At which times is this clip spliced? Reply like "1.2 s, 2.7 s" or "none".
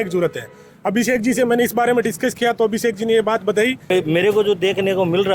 3.8 s